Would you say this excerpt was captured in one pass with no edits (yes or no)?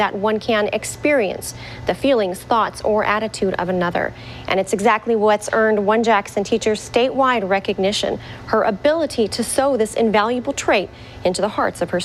yes